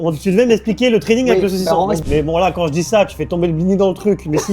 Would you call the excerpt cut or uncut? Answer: cut